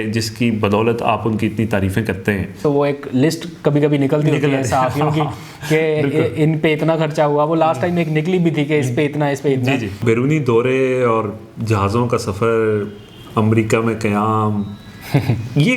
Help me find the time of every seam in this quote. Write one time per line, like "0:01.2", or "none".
0:02.6
0:10.0